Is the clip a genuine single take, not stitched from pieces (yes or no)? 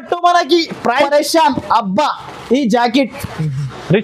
no